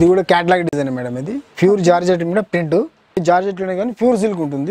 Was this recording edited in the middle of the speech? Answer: yes; 1 cut; at 3.2 s

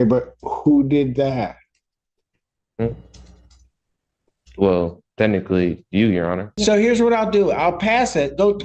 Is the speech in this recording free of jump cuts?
no; 1 cut; at 6.5 s

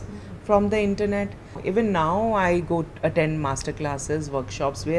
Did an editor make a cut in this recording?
yes; 1 cut; at 1.6 s

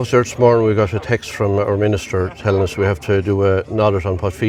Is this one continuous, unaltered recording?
yes; 0 cuts

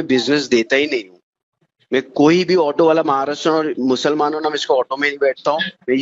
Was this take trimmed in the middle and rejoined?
no; 0 cuts

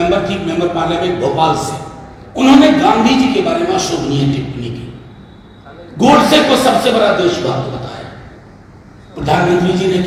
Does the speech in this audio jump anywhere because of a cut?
no; 0 cuts

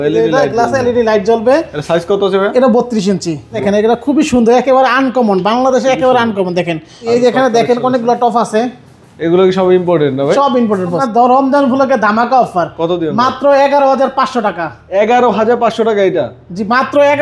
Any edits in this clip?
yes; 3 cuts; at 3.6 s, 7.1 s, 11.0 s

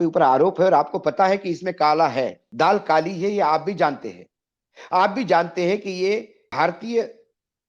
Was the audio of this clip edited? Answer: yes; 2 cuts; at 2.4 s, 6.4 s

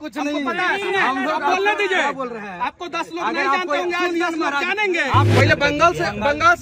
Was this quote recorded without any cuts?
no; 1 cut; at 5.3 s

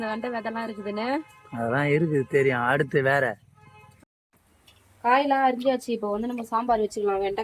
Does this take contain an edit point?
yes; 1 cut; at 4.2 s

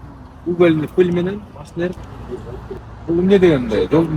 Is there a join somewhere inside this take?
yes; 1 cut; at 2.8 s

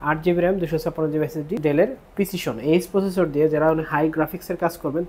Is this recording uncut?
no; 1 cut; at 1.6 s

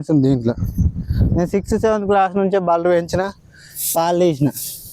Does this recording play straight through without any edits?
yes; 0 cuts

